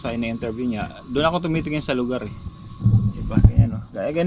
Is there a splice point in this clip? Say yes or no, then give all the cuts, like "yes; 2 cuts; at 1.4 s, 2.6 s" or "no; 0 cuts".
no; 0 cuts